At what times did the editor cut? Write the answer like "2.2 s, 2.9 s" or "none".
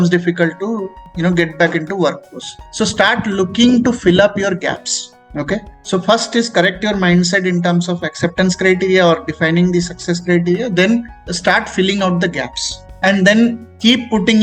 12.9 s